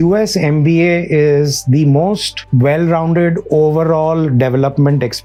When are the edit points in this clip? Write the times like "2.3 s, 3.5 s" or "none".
none